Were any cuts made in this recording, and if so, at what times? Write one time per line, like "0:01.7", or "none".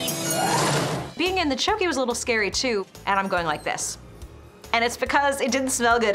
0:01.1
0:02.9